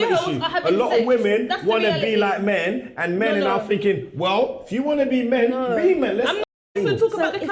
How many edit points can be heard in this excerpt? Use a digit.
1